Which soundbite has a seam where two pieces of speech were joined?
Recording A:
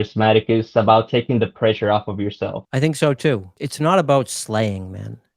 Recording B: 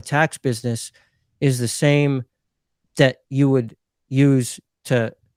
A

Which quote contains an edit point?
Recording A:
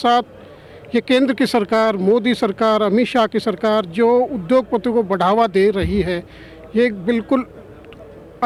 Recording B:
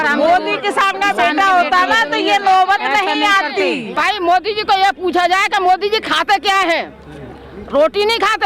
B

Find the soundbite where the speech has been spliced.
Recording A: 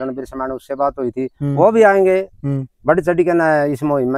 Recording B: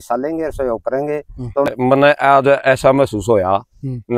B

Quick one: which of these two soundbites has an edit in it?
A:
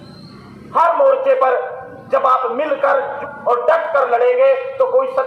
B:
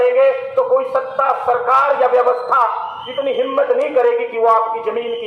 A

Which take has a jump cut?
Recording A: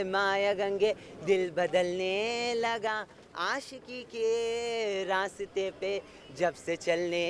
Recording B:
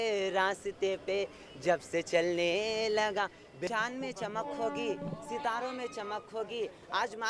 B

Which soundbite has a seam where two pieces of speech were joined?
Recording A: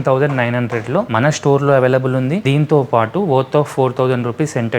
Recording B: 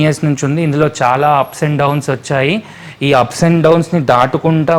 A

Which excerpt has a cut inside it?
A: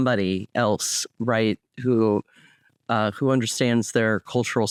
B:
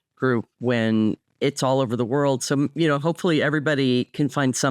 B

